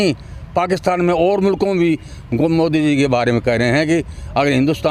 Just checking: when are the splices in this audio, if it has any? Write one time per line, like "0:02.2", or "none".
none